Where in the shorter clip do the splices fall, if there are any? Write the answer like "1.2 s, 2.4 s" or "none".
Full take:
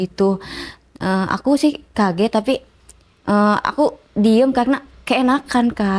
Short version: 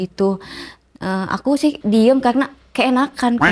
1.8 s